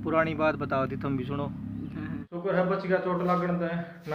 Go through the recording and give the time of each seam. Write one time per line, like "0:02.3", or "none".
0:02.3